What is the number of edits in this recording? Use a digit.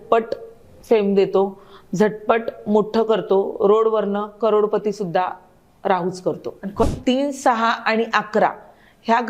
1